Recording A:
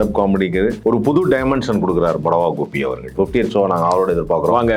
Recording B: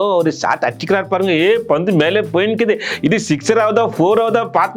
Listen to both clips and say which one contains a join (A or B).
A